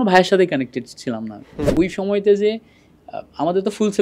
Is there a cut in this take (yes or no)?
yes